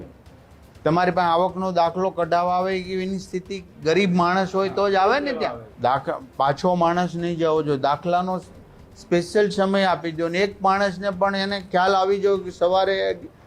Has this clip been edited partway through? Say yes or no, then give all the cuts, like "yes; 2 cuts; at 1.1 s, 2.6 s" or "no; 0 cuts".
yes; 1 cut; at 5.6 s